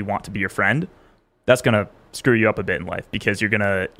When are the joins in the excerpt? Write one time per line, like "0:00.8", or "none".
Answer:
none